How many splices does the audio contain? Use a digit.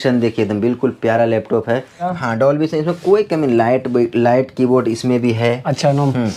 1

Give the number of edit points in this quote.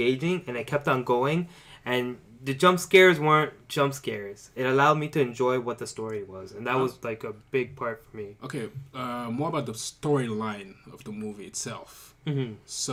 0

